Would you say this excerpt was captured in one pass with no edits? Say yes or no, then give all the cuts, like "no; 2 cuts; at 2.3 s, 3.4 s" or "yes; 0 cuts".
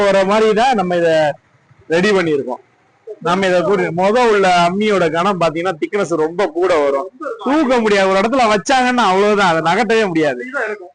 yes; 0 cuts